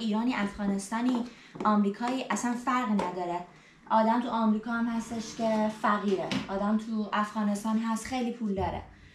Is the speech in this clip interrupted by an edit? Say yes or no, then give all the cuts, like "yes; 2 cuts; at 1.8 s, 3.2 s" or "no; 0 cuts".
no; 0 cuts